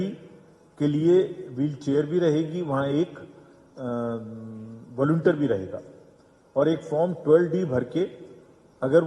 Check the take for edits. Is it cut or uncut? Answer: uncut